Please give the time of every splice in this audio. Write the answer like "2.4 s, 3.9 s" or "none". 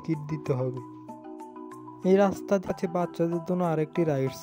2.7 s

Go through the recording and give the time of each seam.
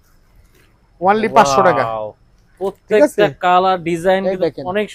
none

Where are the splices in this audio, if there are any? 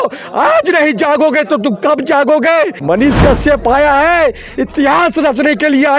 2.8 s

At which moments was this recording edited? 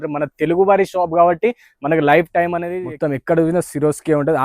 2.6 s

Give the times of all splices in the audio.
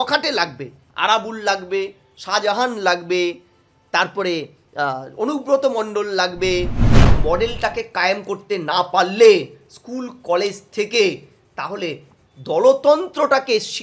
7.0 s

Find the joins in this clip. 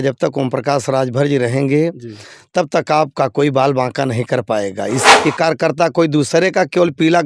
5.0 s

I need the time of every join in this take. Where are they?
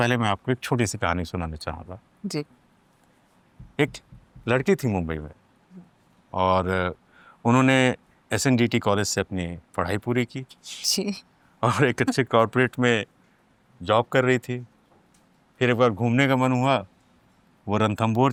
none

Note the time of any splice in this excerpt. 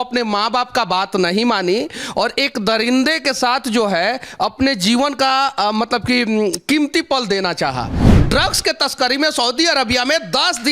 8.0 s

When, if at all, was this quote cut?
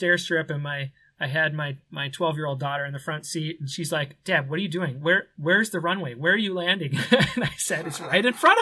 none

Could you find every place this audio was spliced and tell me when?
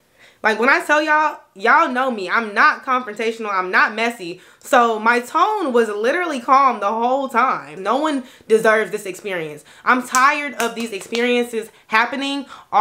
7.7 s

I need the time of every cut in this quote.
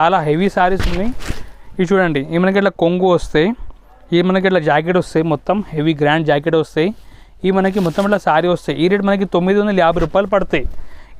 none

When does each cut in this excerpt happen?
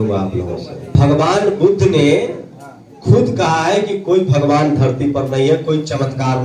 0.9 s

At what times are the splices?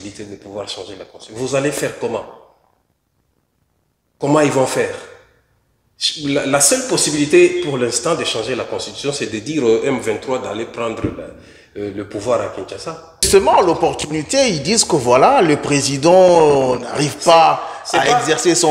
13.3 s

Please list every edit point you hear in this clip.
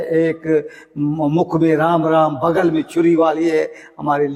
none

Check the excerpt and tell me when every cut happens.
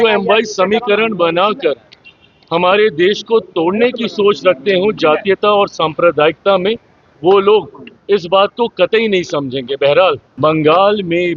10.3 s

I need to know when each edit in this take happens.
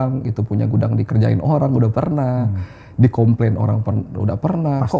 none

